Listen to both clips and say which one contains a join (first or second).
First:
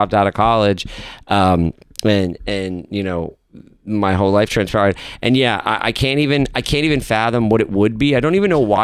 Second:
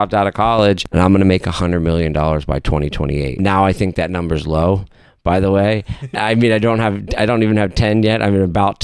second